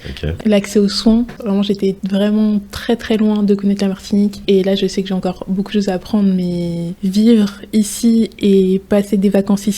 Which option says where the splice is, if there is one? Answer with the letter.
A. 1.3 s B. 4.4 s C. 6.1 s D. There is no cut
A